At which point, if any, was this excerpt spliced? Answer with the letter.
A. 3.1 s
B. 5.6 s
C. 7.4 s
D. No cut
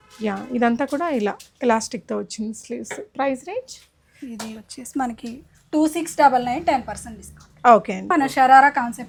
D